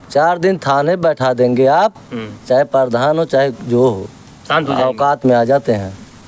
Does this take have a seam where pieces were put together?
no; 0 cuts

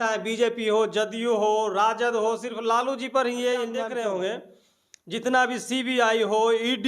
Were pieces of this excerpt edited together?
yes; 1 cut; at 3.8 s

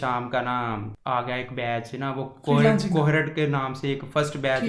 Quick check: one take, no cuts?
no; 1 cut; at 0.9 s

